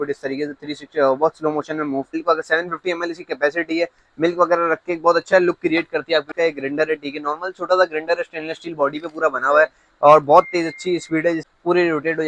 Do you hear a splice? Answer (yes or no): yes